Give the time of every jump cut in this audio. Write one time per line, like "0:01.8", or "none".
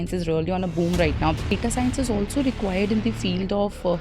0:01.4